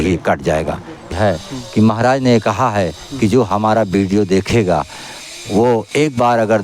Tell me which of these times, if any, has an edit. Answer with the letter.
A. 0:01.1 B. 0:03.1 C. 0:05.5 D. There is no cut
A